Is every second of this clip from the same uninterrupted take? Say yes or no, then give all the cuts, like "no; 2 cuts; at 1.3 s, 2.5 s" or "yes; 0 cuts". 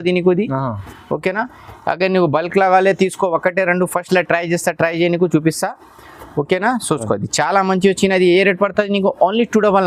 yes; 0 cuts